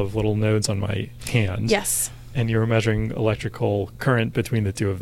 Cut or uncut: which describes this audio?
uncut